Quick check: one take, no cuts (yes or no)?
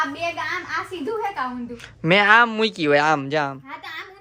yes